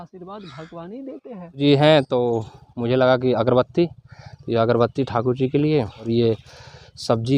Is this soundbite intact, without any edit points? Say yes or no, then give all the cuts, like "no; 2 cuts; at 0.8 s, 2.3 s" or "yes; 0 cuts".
no; 2 cuts; at 1.6 s, 6.1 s